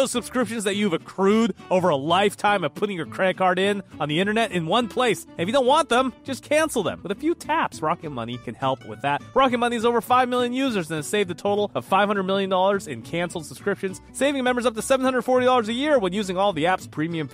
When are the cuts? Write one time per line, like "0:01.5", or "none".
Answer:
none